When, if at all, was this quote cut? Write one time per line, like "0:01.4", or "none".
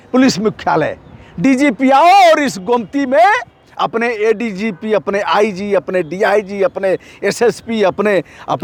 none